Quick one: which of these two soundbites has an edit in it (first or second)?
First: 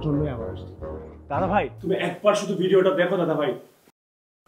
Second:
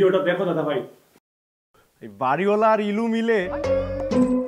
second